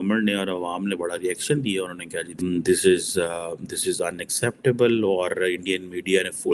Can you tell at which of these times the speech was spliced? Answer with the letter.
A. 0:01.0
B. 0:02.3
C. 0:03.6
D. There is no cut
B